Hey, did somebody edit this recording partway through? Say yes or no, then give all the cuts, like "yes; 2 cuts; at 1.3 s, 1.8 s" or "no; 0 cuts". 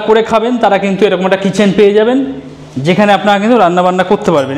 no; 0 cuts